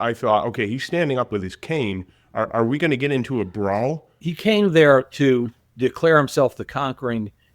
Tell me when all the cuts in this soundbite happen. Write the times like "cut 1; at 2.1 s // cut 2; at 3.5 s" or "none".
cut 1; at 4.2 s